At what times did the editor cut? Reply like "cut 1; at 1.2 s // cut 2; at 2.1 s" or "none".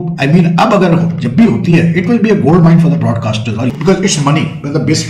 cut 1; at 3.7 s